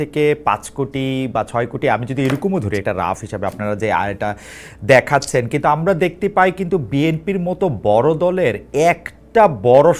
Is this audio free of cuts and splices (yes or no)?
yes